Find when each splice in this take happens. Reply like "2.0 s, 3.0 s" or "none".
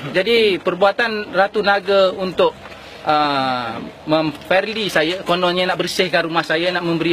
1.4 s

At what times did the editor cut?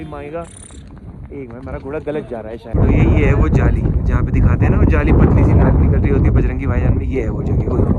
2.7 s

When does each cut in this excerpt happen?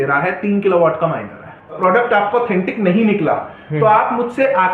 1.8 s

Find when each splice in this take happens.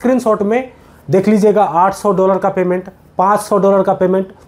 none

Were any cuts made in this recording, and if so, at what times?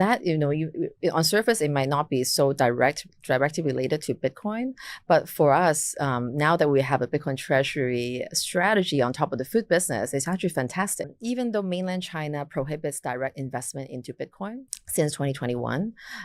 11.1 s, 14.8 s

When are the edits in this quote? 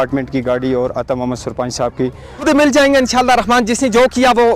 2.4 s

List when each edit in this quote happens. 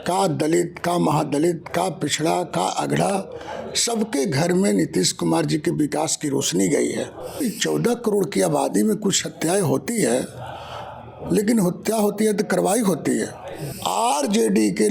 7.4 s, 13.7 s

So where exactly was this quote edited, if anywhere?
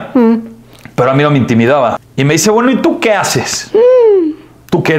2.1 s

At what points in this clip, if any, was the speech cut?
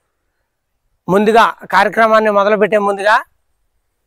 none

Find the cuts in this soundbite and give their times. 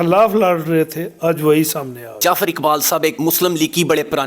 2.2 s, 3.2 s

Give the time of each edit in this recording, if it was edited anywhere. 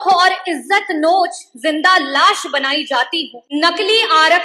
3.4 s

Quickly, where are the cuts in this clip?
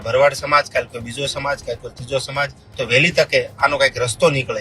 2.6 s

